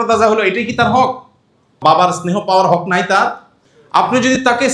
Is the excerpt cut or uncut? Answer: uncut